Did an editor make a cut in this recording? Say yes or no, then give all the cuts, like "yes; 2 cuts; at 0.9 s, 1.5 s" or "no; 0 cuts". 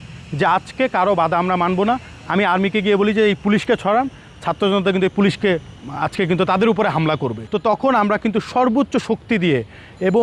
yes; 1 cut; at 7.4 s